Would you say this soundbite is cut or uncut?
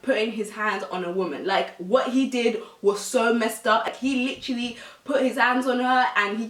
uncut